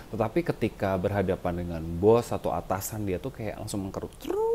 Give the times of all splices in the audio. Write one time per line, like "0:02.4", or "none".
none